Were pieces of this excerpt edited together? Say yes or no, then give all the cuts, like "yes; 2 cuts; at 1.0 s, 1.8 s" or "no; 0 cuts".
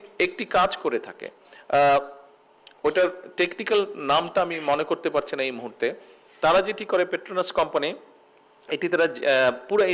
no; 0 cuts